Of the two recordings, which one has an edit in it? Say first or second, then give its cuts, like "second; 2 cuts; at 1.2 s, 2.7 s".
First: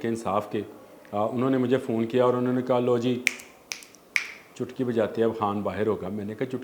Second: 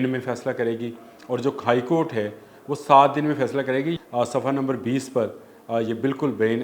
second; 1 cut; at 4.0 s